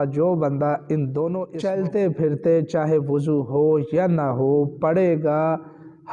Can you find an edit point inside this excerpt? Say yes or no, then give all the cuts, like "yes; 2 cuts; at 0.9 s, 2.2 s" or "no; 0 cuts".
yes; 1 cut; at 1.5 s